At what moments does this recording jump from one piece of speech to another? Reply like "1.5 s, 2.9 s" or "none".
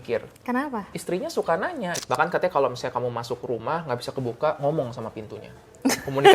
2.0 s